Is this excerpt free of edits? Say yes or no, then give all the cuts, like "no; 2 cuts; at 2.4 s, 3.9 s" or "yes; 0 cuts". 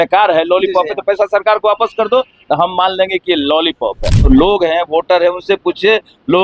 no; 1 cut; at 4.3 s